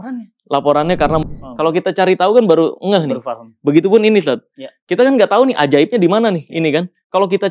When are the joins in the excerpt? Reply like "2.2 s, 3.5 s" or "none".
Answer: 1.3 s